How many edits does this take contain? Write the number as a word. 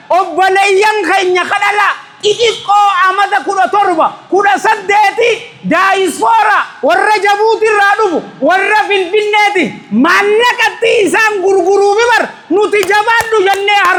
zero